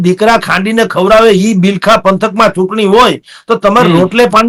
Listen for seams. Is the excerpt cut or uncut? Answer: uncut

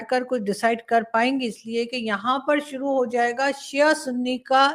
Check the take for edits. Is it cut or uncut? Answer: uncut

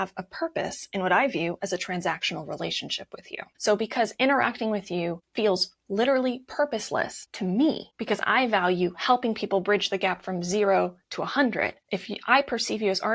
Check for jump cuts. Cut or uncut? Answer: cut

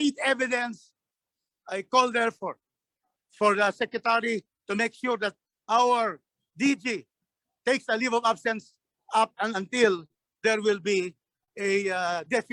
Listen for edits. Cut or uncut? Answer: uncut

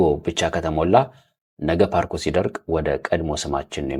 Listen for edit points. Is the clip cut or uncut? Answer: uncut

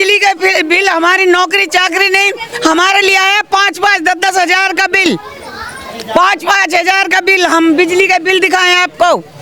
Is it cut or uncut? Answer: uncut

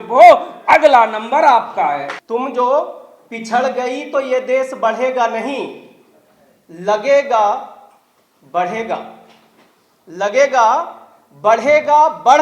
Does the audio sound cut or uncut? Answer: cut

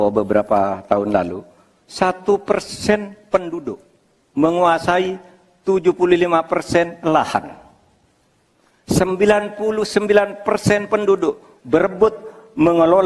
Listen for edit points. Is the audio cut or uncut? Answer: uncut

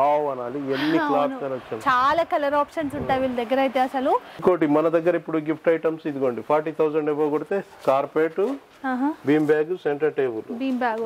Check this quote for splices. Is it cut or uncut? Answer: cut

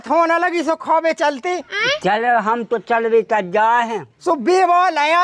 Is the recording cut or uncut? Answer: uncut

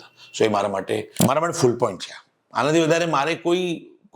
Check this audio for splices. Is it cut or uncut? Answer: cut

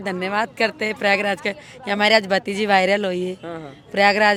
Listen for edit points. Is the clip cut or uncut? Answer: uncut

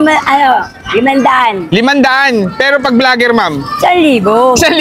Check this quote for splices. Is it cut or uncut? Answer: uncut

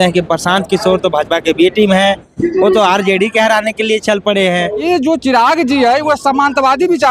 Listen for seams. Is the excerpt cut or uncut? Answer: cut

